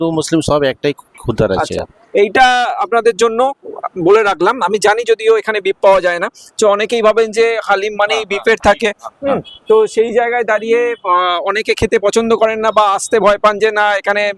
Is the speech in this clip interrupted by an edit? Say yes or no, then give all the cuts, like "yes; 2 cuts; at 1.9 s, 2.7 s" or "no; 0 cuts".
no; 0 cuts